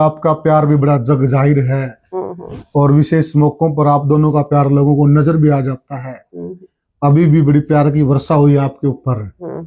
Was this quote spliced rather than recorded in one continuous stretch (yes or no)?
no